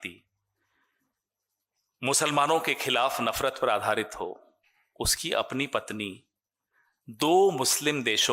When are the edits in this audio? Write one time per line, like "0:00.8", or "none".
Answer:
none